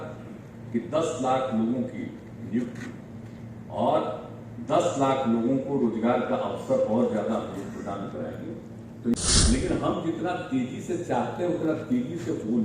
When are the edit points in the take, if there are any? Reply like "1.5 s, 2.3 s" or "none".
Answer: 9.1 s